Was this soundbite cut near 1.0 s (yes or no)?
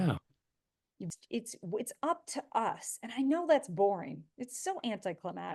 yes